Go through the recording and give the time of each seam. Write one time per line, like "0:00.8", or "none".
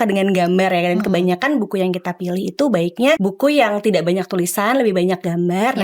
0:03.2